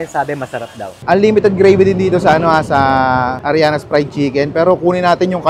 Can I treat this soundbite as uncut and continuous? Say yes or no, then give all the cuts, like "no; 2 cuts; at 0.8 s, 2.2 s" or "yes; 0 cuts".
no; 1 cut; at 0.9 s